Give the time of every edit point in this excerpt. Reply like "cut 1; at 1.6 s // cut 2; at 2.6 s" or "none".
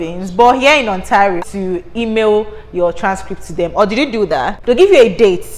cut 1; at 1.4 s // cut 2; at 4.6 s